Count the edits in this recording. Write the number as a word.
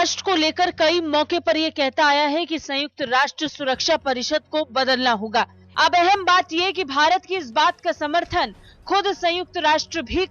one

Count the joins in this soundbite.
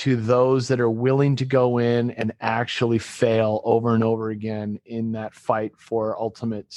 zero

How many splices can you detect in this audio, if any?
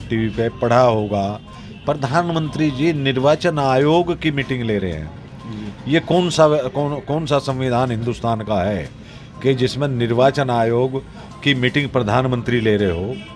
zero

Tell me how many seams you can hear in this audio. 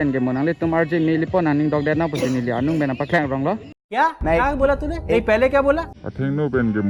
zero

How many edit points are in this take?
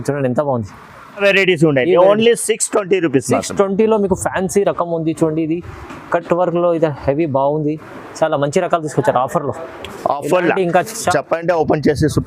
two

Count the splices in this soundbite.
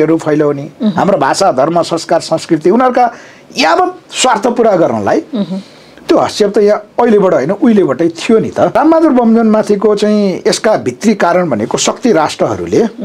one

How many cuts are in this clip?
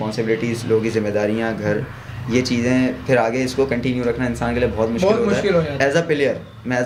zero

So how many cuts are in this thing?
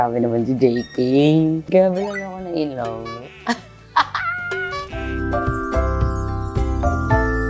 one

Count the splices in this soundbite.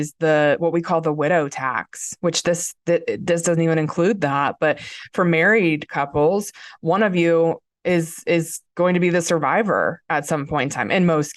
zero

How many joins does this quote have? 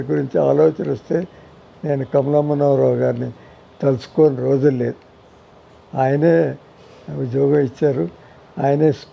zero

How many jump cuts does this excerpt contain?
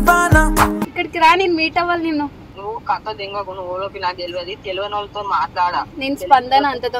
zero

